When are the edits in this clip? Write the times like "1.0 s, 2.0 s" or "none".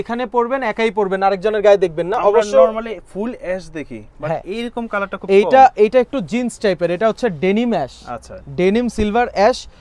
none